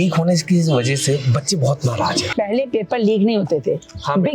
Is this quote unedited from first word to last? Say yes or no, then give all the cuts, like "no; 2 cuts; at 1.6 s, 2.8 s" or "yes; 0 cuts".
no; 1 cut; at 2.3 s